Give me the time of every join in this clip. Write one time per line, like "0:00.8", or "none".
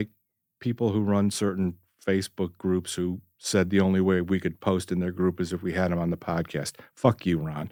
none